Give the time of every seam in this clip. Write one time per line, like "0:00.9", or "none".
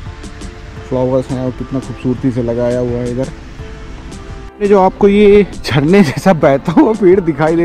0:04.4
0:05.6